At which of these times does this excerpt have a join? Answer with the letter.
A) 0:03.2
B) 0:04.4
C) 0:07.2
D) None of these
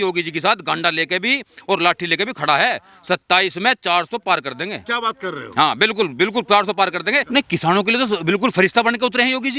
C